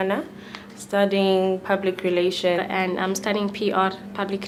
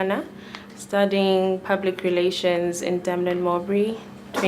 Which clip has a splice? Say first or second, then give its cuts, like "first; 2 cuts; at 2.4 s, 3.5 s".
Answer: second; 1 cut; at 2.6 s